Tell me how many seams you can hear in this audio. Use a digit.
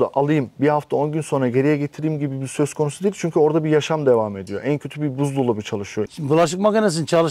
1